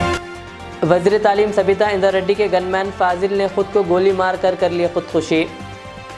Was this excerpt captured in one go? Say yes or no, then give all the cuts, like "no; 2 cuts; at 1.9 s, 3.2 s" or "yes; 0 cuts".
yes; 0 cuts